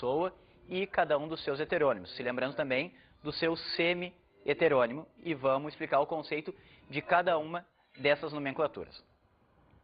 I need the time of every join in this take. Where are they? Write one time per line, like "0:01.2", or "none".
none

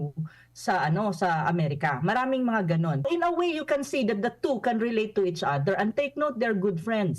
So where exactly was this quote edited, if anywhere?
0:03.0

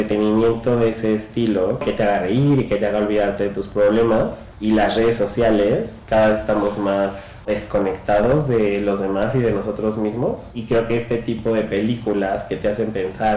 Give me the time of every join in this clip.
0:01.8
0:04.5
0:07.5
0:10.5

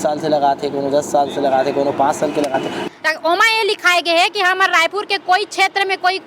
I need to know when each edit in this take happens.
0:02.8

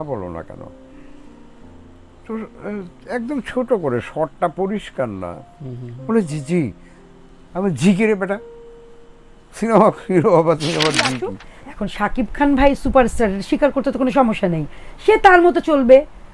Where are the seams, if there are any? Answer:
0:11.4

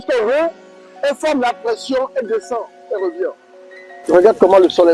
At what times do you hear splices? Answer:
0:03.9

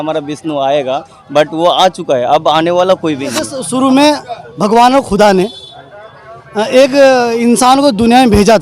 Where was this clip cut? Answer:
0:03.6

